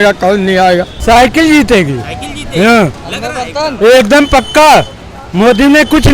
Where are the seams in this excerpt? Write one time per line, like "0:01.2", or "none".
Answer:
0:00.9